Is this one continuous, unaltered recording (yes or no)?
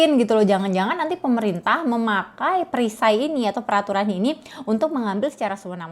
yes